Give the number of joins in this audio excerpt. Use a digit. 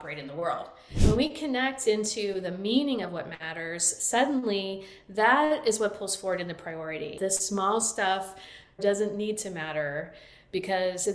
2